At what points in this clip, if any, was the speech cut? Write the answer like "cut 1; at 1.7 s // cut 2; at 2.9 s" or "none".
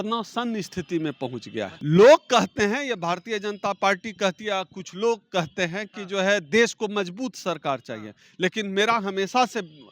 cut 1; at 1.7 s